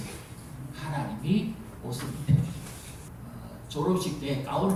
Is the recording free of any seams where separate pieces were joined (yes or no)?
yes